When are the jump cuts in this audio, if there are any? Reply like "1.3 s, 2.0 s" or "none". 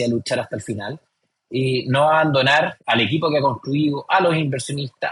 none